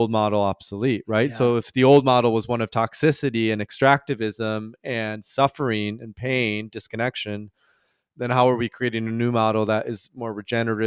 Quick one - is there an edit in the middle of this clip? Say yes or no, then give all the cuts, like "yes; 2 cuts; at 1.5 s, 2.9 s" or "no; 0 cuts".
no; 0 cuts